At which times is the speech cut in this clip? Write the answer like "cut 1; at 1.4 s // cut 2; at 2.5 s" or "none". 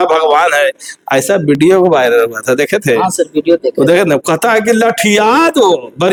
none

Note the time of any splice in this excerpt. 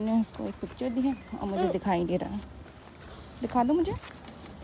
none

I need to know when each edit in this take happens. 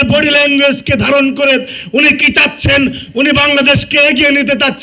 none

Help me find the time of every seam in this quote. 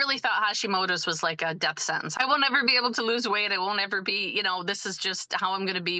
cut 1; at 2.1 s

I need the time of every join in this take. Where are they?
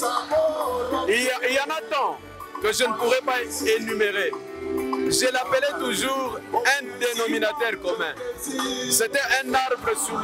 none

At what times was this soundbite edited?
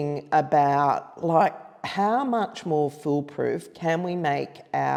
none

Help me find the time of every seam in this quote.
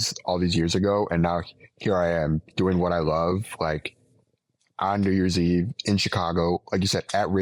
none

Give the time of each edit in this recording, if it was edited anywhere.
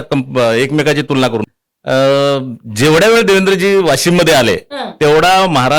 cut 1; at 1.5 s

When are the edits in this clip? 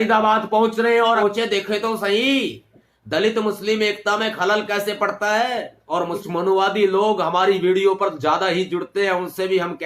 cut 1; at 1.2 s // cut 2; at 6.2 s

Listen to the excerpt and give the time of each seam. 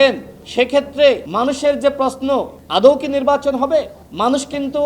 cut 1; at 1.3 s // cut 2; at 2.6 s

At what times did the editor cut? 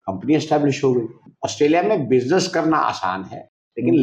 cut 1; at 1.2 s

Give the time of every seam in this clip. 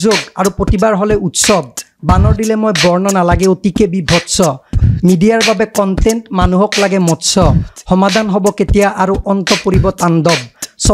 none

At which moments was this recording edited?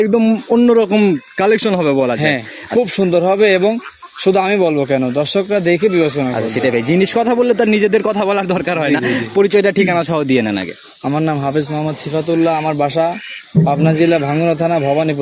none

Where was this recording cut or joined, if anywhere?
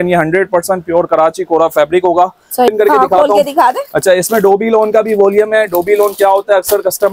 cut 1; at 2.7 s

